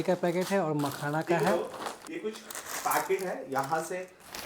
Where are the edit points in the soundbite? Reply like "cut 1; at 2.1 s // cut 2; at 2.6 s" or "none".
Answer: cut 1; at 1.5 s